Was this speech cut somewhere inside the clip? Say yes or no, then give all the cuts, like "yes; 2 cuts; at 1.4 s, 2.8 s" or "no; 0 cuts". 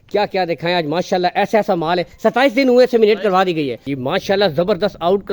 yes; 1 cut; at 3.9 s